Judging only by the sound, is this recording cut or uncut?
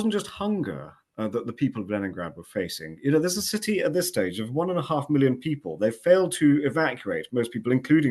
uncut